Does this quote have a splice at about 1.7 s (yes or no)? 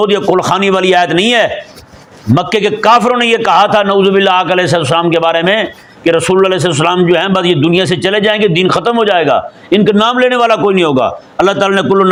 no